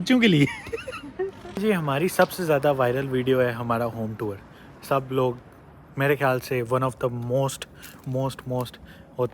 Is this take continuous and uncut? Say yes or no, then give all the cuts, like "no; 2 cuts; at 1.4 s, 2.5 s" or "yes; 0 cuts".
no; 1 cut; at 1.5 s